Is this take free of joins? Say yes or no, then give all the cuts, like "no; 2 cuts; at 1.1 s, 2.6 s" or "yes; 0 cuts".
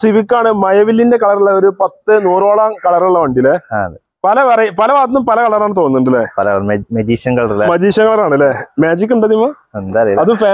yes; 0 cuts